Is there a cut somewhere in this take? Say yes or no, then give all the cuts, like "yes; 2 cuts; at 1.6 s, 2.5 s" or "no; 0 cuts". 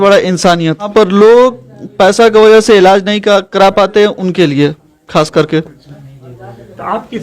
yes; 1 cut; at 0.9 s